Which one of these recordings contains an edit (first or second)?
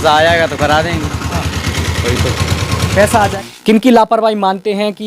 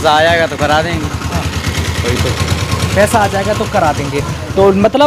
first